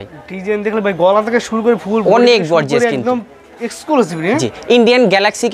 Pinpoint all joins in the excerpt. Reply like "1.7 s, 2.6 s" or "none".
none